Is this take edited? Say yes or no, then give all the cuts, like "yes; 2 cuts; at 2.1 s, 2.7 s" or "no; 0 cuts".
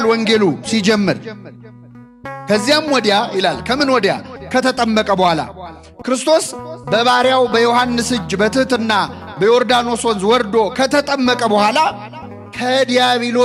no; 0 cuts